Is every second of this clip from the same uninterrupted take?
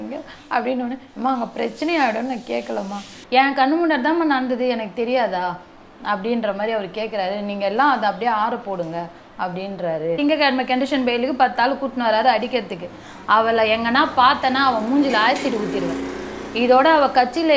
no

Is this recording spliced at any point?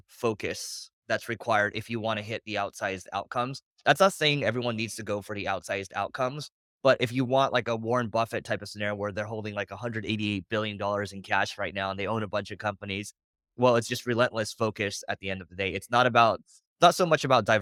no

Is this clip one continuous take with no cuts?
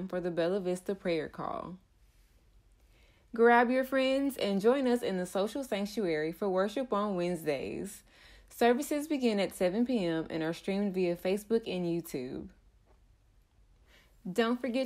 yes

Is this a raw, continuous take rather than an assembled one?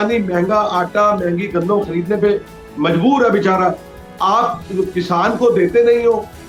yes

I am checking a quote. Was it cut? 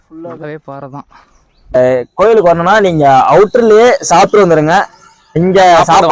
yes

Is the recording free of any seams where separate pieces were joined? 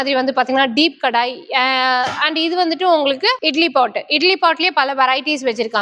yes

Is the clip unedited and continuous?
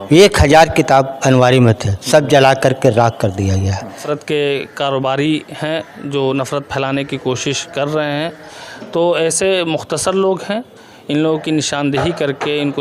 no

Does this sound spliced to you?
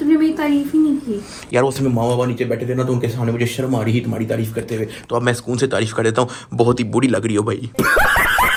no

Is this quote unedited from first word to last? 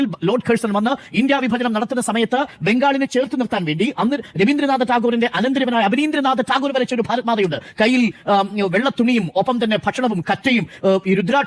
yes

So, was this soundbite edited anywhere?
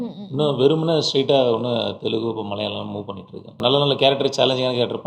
yes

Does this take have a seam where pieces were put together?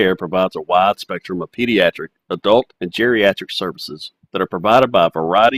no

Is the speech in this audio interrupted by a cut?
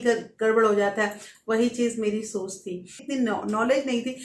yes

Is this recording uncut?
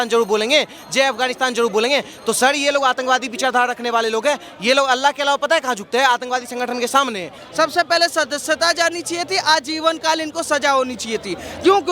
no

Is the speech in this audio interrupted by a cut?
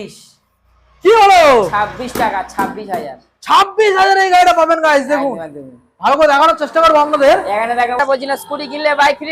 yes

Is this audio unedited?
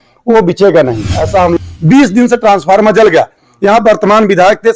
no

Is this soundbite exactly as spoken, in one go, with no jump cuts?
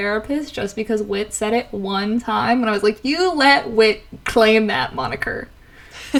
yes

